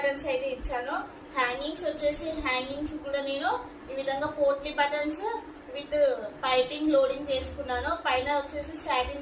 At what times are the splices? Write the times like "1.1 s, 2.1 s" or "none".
none